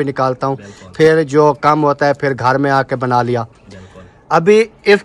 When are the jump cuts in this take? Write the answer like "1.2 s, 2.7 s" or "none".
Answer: none